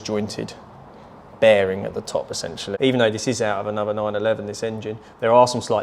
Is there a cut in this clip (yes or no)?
yes